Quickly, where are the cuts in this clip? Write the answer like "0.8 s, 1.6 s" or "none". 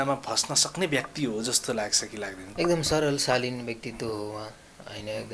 2.5 s